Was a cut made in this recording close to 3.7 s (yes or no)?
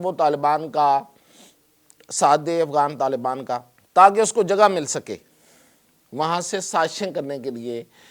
yes